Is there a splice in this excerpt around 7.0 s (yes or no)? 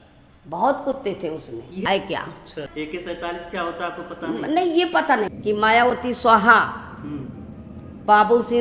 no